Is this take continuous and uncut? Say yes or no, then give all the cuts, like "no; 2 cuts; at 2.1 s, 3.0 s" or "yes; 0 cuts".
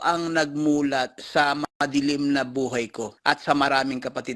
no; 2 cuts; at 1.6 s, 3.0 s